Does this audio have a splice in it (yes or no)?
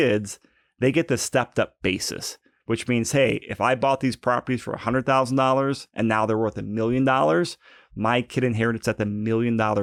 no